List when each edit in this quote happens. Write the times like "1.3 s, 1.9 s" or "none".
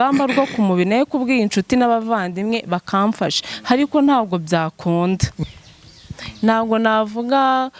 5.3 s

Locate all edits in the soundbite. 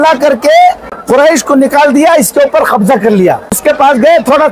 0.9 s, 3.6 s

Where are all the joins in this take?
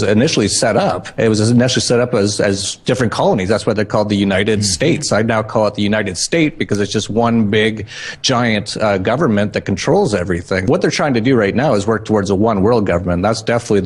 10.7 s

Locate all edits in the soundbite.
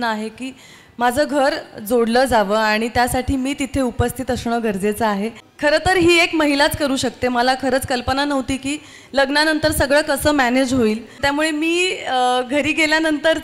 5.4 s, 11.1 s

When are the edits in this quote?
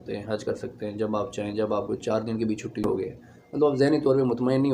2.8 s

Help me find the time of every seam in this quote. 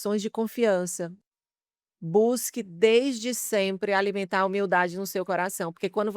1.2 s

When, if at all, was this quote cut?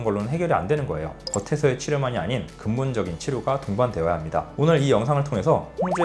none

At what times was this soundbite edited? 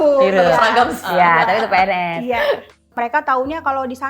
1.0 s, 2.8 s

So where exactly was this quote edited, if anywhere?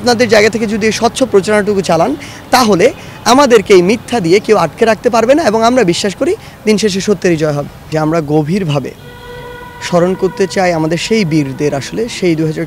7.9 s

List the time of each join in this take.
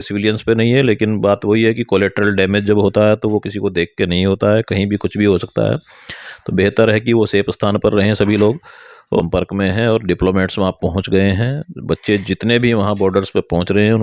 9.2 s

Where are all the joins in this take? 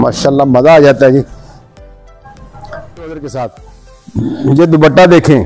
3.2 s

